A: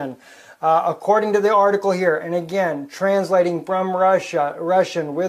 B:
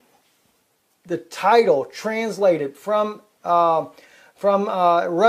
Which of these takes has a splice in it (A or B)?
B